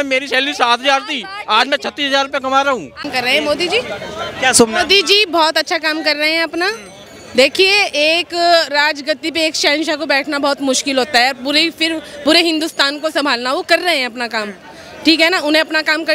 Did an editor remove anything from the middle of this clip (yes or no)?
yes